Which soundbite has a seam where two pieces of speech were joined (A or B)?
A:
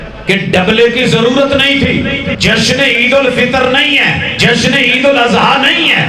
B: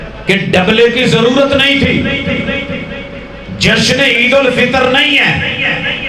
A